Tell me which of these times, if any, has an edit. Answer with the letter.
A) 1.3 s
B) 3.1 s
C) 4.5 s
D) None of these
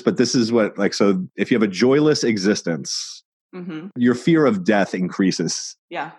D